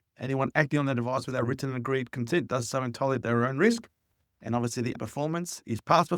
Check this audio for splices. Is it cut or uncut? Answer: cut